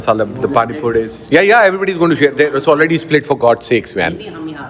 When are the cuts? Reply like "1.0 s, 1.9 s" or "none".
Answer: none